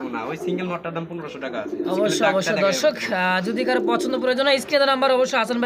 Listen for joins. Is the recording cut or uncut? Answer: uncut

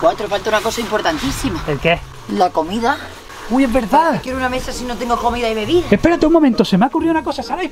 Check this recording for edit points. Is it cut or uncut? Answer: uncut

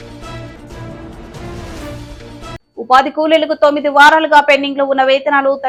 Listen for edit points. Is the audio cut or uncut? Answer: uncut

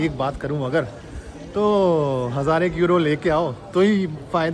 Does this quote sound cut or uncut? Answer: uncut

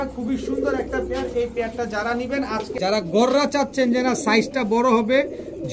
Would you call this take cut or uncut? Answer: cut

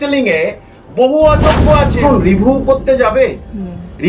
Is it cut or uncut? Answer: cut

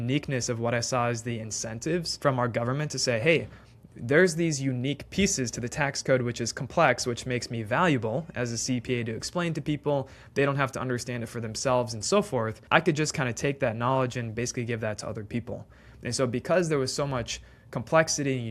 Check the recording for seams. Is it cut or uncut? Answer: cut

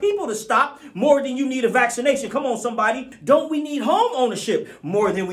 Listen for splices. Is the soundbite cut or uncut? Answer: cut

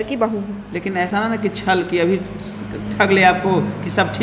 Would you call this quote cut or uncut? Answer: uncut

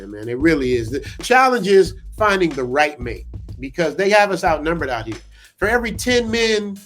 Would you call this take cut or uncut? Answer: cut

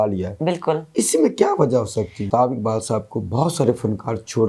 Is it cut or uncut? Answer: cut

